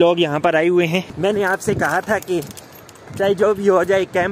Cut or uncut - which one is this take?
cut